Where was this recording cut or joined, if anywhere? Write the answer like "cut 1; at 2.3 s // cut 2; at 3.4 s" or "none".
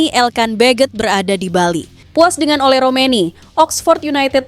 cut 1; at 1.9 s